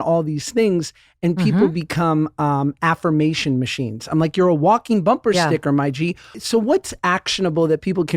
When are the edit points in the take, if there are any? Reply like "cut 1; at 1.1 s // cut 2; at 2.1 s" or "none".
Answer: cut 1; at 6.3 s